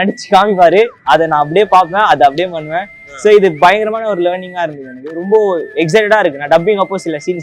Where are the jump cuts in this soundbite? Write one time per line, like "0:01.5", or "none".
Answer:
none